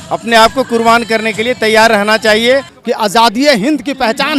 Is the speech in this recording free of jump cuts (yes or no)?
no